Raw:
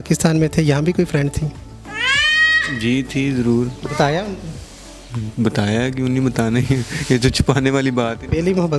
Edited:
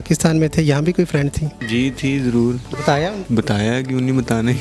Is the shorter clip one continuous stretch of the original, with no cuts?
no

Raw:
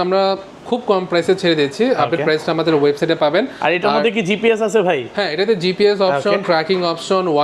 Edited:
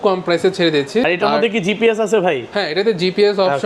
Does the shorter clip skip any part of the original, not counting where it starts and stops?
yes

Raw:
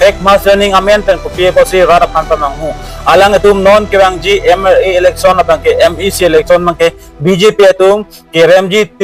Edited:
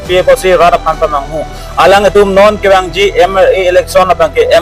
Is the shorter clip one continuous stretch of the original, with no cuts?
yes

